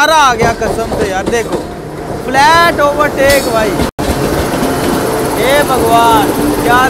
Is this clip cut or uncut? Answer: uncut